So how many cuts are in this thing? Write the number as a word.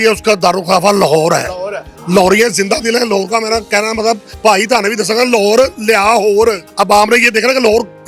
two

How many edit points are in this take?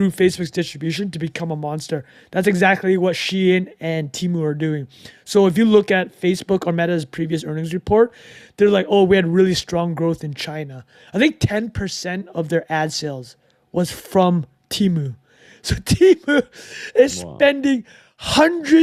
zero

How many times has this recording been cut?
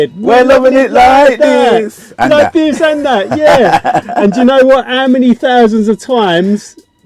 zero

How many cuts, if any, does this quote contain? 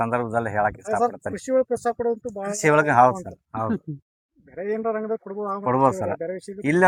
zero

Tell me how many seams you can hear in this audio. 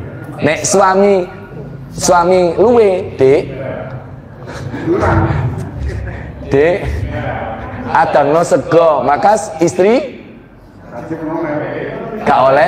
zero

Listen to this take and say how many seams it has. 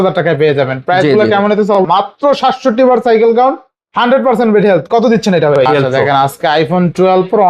two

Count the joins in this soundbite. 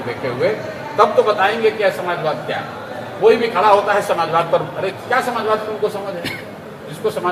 zero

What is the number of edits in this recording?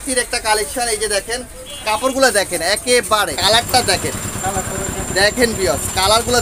one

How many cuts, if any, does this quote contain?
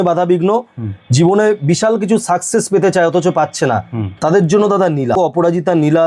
one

